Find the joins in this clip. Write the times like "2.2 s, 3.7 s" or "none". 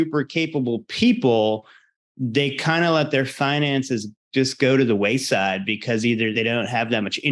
6.3 s